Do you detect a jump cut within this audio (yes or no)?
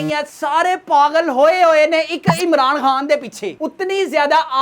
yes